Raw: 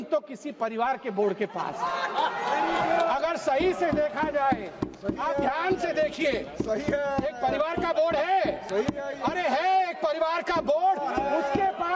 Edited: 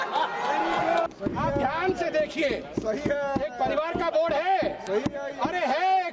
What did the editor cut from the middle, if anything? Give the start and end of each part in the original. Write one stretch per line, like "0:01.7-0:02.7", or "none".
0:03.1-0:04.9